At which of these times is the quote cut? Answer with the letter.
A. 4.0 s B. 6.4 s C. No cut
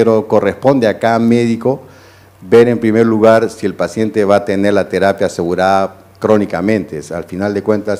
C